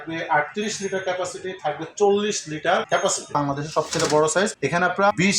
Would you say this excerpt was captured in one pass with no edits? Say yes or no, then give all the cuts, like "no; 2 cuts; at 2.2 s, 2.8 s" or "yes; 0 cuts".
no; 1 cut; at 3.4 s